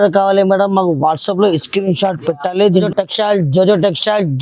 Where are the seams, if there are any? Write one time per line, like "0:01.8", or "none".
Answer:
0:02.9